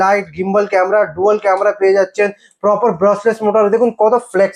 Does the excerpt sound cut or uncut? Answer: uncut